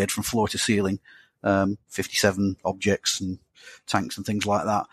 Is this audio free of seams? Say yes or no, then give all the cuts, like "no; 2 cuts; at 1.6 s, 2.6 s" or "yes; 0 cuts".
yes; 0 cuts